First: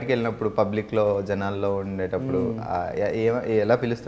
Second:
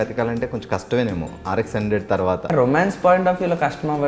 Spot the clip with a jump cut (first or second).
second